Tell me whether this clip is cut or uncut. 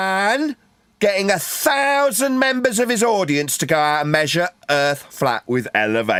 uncut